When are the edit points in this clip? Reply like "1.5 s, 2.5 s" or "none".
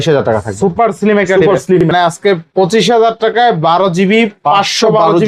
1.9 s